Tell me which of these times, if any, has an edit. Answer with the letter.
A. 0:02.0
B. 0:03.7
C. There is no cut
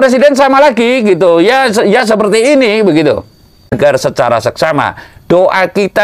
B